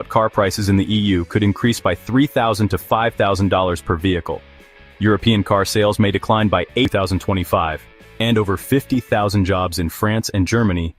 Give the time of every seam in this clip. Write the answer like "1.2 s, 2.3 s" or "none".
6.9 s